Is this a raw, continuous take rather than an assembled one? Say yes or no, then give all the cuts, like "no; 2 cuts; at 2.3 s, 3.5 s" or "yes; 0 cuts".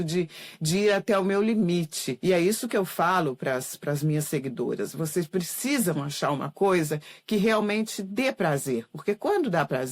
no; 1 cut; at 2.0 s